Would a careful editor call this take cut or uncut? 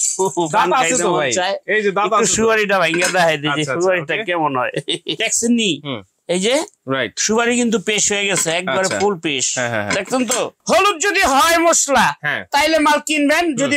cut